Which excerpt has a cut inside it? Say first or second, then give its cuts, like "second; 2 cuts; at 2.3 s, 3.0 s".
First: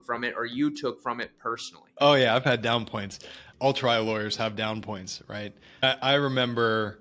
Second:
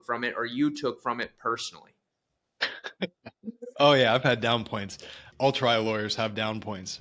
first; 2 cuts; at 1.8 s, 5.8 s